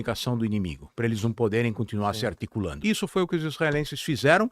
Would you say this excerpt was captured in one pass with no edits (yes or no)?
no